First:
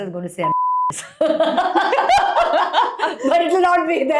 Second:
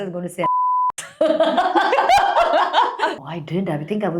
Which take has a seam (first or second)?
second